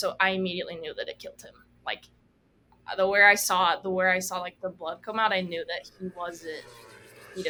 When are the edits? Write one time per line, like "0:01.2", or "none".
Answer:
none